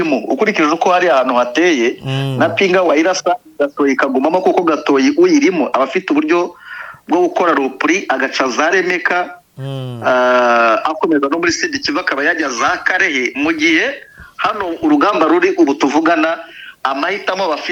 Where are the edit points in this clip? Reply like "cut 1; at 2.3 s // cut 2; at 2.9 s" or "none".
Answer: none